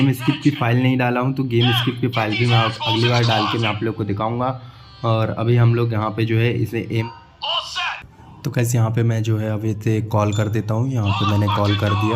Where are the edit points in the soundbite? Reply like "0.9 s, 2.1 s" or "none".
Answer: 7.1 s